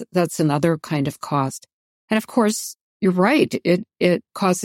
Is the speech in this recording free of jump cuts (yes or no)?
yes